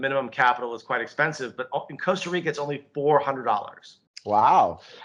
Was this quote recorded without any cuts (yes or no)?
yes